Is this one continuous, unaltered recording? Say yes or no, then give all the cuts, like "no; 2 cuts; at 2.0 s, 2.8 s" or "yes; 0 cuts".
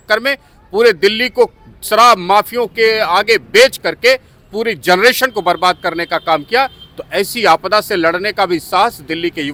yes; 0 cuts